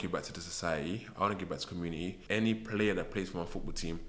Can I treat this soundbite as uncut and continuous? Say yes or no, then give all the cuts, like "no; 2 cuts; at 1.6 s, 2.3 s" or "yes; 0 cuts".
no; 1 cut; at 2.2 s